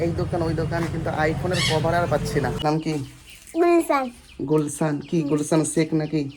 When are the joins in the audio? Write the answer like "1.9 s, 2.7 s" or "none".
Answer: 2.6 s